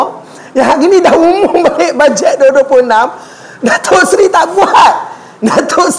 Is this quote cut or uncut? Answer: uncut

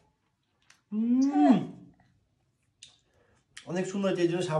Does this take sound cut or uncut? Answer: uncut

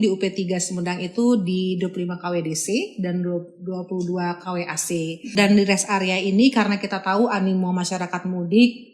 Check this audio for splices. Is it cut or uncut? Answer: cut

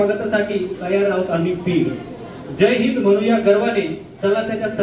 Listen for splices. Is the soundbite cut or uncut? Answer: uncut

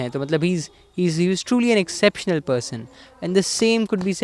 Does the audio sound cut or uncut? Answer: uncut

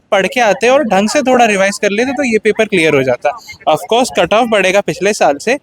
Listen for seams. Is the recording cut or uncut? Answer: uncut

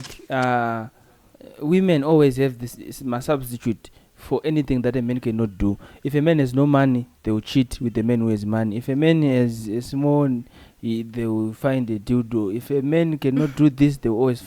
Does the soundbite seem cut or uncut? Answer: uncut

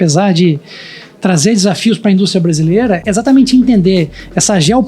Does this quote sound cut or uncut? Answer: cut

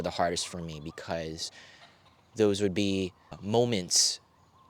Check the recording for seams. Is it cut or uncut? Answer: cut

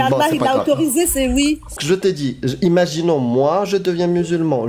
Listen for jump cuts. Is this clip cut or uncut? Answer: cut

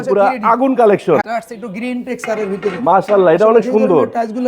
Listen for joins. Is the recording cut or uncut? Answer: cut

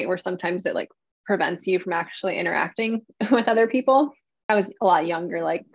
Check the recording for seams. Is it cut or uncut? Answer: cut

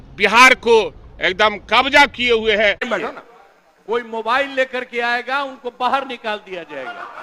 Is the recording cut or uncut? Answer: cut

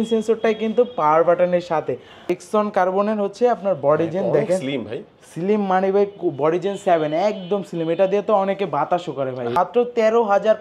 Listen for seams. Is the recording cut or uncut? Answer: cut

